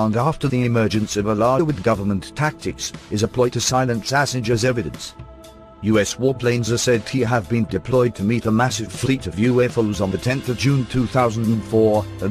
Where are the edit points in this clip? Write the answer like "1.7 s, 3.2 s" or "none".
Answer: none